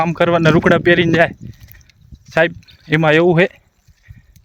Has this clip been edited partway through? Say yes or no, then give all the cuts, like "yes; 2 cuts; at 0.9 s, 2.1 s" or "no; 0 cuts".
no; 0 cuts